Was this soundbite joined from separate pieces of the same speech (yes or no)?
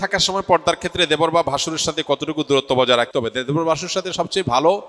no